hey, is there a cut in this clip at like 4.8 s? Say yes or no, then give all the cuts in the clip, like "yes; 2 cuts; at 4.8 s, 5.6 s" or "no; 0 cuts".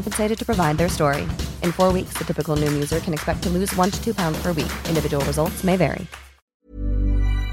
no; 1 cut; at 6.6 s